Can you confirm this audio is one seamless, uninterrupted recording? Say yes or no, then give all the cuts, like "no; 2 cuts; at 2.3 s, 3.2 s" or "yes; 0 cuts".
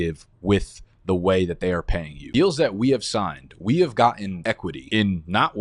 no; 1 cut; at 2.2 s